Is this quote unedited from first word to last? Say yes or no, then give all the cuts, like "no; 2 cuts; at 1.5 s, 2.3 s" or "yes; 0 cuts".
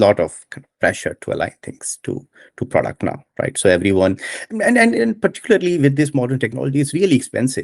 yes; 0 cuts